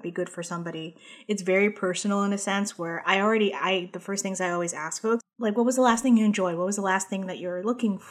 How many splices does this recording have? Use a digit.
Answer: 1